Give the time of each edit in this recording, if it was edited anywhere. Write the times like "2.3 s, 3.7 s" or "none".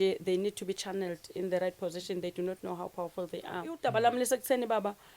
3.8 s